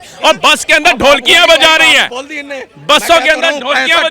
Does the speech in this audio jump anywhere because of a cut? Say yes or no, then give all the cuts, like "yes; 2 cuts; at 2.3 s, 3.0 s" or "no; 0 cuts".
no; 0 cuts